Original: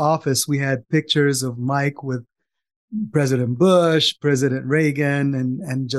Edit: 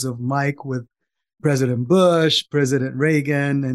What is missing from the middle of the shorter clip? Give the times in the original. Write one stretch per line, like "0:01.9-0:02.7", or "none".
0:02.8-0:03.1